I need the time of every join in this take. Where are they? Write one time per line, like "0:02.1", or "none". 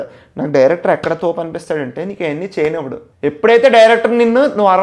none